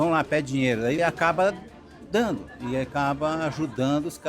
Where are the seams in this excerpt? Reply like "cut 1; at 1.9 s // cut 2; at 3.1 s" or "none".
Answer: cut 1; at 1.0 s